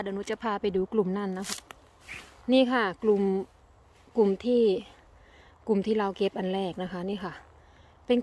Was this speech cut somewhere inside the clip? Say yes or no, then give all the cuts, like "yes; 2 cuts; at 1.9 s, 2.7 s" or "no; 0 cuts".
yes; 1 cut; at 1.4 s